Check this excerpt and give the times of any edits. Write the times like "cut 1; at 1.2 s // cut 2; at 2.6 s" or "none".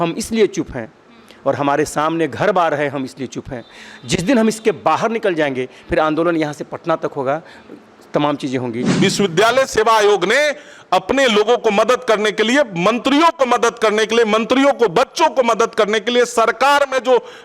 cut 1; at 8.9 s